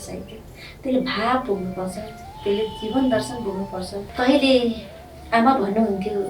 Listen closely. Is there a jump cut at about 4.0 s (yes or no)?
yes